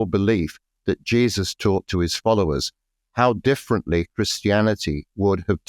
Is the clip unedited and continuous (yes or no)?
yes